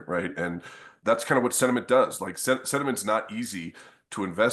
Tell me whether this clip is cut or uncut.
cut